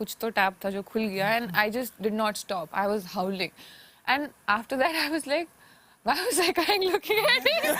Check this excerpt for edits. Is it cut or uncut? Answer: uncut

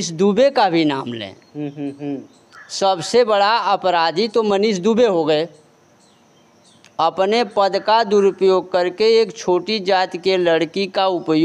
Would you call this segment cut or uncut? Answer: uncut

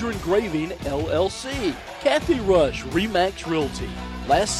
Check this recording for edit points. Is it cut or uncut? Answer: cut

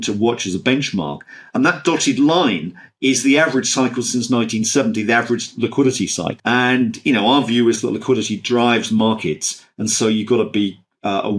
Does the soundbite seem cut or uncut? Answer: cut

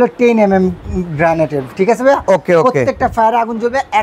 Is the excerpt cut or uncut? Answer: uncut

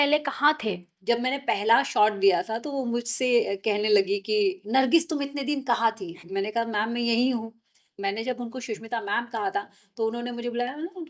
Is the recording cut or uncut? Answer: cut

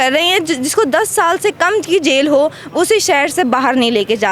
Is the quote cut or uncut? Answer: uncut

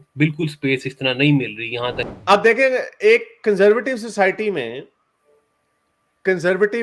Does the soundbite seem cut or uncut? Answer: cut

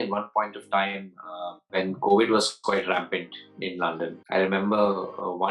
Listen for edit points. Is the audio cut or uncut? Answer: cut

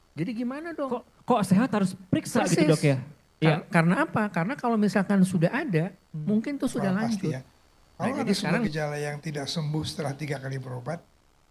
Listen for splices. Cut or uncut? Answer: cut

